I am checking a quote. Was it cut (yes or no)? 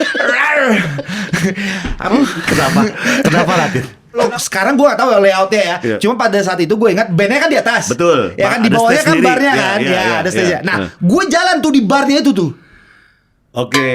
yes